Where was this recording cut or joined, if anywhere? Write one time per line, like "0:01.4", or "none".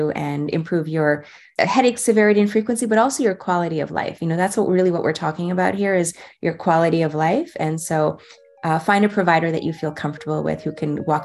0:01.4